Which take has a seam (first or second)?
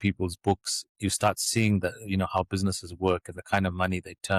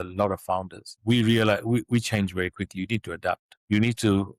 second